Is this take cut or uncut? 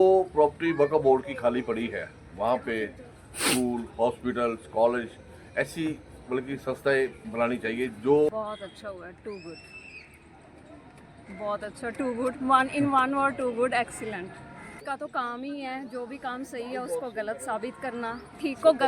cut